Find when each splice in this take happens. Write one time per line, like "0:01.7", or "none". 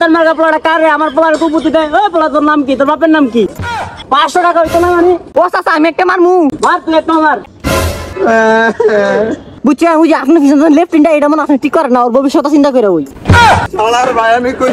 0:03.7
0:06.6
0:09.5
0:13.7